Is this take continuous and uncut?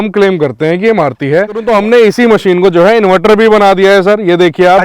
no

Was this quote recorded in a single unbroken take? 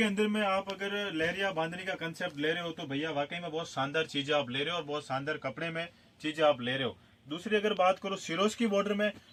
yes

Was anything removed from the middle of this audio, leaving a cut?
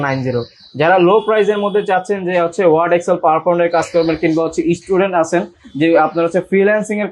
no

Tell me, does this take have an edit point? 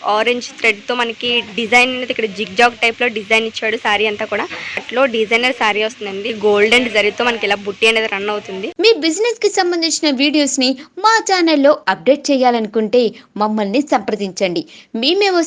yes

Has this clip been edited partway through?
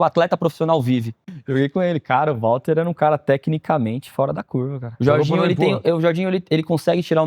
yes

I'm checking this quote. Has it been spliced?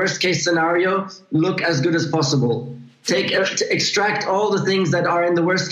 no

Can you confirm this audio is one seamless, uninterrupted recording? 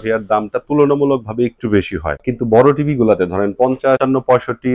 no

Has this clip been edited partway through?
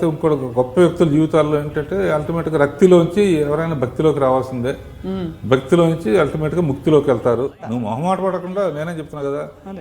yes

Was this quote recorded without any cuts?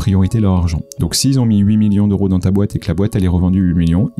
yes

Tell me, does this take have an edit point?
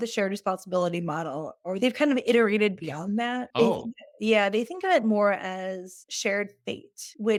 no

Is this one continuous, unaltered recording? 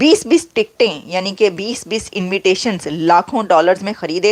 yes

